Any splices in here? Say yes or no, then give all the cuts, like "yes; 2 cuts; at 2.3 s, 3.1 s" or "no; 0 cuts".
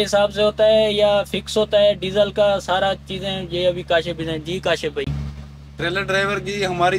no; 0 cuts